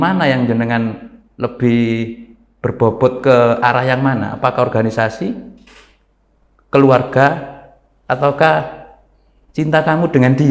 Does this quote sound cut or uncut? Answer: uncut